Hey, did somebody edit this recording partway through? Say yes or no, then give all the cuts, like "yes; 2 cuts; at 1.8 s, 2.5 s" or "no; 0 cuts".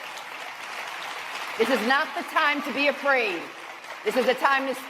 no; 0 cuts